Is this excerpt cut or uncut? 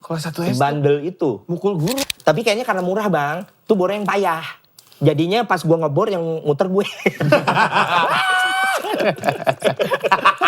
cut